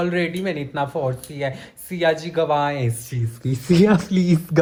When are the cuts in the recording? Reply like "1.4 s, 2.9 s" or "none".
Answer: none